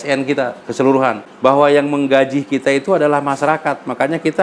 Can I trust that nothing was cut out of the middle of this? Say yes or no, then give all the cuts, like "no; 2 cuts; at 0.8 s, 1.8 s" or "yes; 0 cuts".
no; 1 cut; at 1.3 s